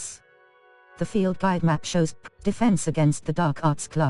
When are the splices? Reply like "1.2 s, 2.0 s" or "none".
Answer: 1.3 s, 2.3 s

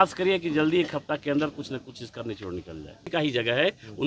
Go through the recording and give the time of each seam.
3.1 s

